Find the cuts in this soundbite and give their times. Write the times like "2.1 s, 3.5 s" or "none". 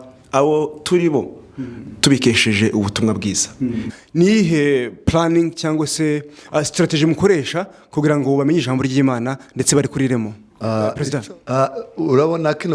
3.9 s, 11.0 s